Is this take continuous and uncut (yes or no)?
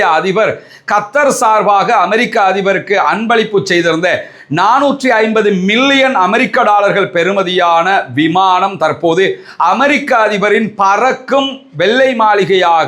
yes